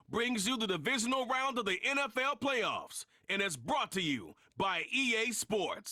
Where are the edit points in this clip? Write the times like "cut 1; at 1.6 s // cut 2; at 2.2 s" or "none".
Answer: none

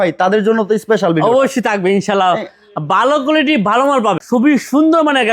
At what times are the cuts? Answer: cut 1; at 4.2 s

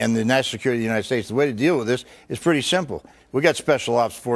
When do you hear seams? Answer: cut 1; at 2.9 s

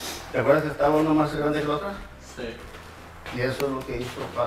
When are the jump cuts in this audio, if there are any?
none

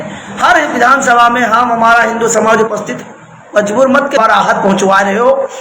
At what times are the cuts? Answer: cut 1; at 4.2 s

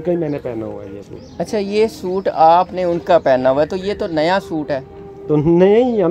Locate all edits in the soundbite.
none

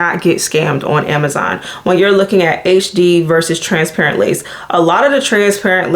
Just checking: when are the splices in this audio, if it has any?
none

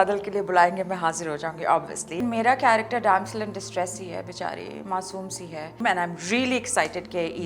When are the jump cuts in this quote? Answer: cut 1; at 2.2 s // cut 2; at 5.7 s

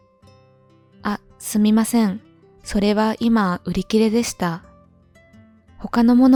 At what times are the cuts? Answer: none

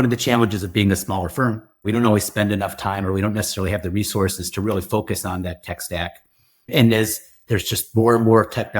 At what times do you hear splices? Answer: cut 1; at 1.8 s

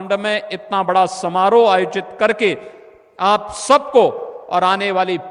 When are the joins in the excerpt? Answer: none

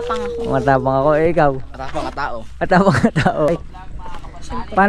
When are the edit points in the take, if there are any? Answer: cut 1; at 3.5 s

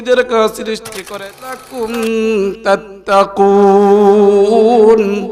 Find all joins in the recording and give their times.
cut 1; at 1.5 s

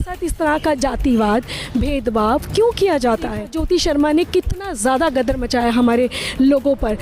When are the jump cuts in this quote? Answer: cut 1; at 3.3 s

